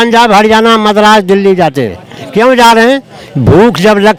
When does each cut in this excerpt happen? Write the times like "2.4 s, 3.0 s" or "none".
none